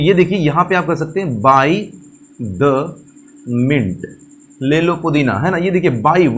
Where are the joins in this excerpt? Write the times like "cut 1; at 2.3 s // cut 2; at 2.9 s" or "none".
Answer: none